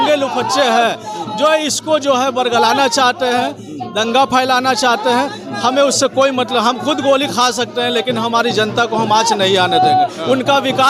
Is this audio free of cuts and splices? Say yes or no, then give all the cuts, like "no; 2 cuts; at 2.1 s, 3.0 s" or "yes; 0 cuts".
yes; 0 cuts